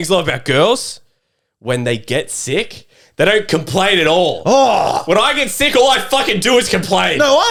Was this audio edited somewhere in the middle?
no; 0 cuts

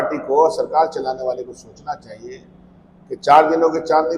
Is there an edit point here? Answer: no; 0 cuts

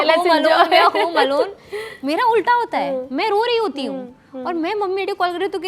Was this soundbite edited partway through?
no; 0 cuts

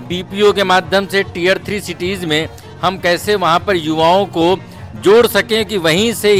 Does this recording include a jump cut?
no; 0 cuts

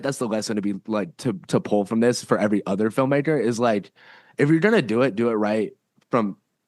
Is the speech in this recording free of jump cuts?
yes; 0 cuts

